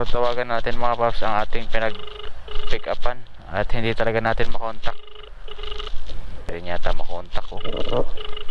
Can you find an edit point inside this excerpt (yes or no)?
no